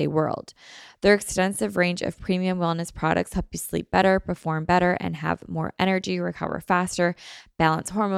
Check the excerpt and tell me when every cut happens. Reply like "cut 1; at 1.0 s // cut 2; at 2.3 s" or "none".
none

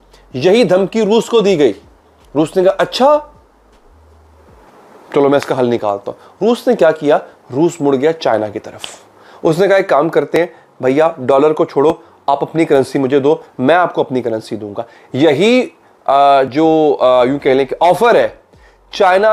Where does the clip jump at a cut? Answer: none

